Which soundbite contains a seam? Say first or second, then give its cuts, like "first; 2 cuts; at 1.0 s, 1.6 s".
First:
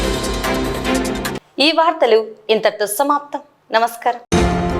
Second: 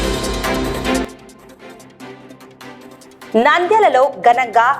second; 3 cuts; at 1.1 s, 2.4 s, 3.3 s